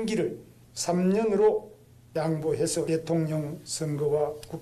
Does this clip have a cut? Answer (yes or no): yes